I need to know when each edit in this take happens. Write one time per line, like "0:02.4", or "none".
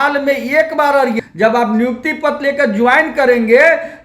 0:01.2